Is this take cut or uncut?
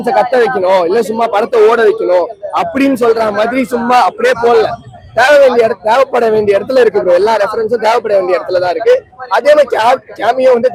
uncut